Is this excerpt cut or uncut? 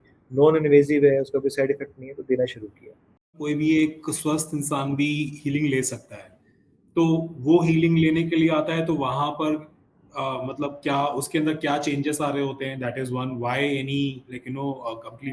cut